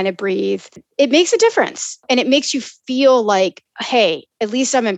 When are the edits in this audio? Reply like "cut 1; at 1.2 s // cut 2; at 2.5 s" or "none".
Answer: cut 1; at 0.9 s // cut 2; at 2.0 s